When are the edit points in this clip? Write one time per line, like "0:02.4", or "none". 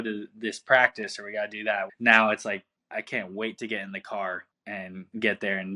0:01.9